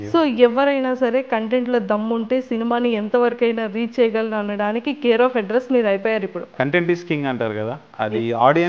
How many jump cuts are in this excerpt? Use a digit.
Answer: 1